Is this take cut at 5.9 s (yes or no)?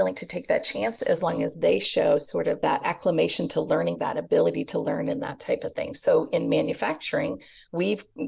no